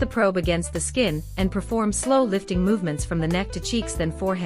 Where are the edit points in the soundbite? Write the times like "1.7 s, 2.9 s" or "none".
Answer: 1.2 s